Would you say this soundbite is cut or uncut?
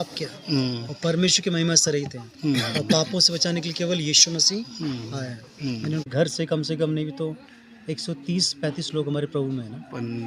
cut